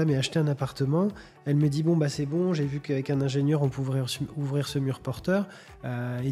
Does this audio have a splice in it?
no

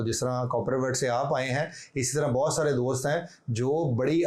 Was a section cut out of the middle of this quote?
no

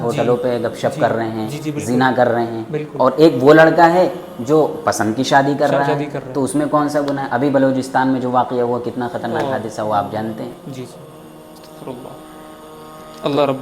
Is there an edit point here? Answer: no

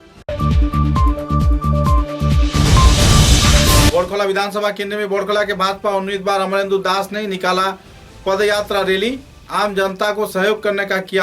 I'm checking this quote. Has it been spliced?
yes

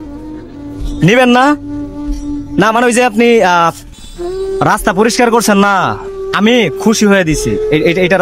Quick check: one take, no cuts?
yes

